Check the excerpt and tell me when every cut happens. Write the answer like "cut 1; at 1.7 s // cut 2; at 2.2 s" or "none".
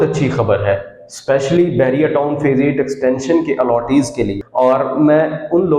cut 1; at 4.4 s